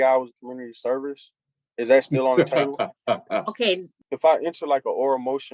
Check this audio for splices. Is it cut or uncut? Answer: cut